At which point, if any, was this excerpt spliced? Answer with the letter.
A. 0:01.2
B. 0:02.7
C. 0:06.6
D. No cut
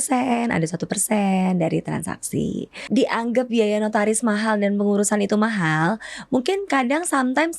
B